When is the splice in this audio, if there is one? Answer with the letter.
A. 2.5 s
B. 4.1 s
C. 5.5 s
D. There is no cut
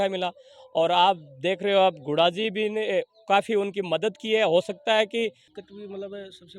C